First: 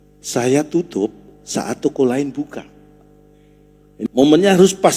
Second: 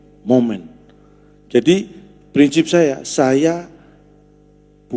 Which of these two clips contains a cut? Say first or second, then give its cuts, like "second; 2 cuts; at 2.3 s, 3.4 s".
first; 1 cut; at 4.1 s